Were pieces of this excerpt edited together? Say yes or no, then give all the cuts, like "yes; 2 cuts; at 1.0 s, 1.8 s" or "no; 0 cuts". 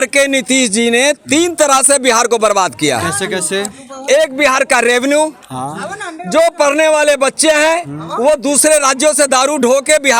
no; 0 cuts